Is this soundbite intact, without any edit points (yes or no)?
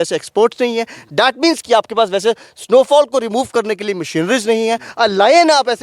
yes